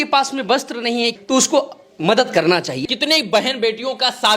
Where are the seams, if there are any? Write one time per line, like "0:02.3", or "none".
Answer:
0:01.2
0:02.8

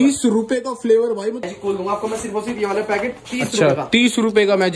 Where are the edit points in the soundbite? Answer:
0:01.4
0:03.2

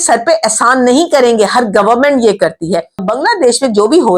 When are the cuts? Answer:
0:03.0

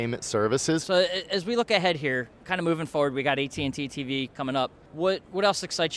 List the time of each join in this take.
0:00.8
0:02.4
0:04.8

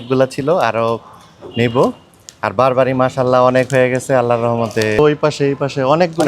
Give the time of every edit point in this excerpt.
0:05.0

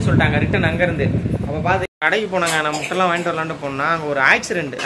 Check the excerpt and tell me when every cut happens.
0:01.9

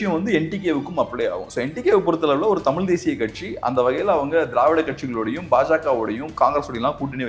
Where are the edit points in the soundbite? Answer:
none

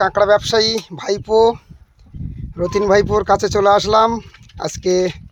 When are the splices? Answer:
none

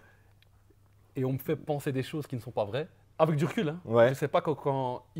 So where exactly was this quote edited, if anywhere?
0:03.0

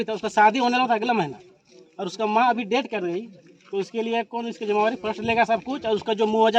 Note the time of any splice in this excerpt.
none

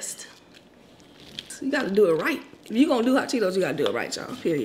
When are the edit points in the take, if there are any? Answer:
0:01.4

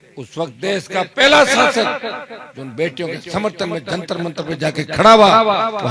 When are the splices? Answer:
none

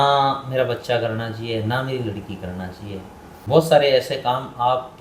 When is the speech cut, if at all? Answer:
0:03.3

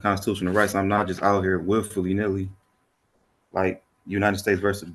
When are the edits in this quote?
none

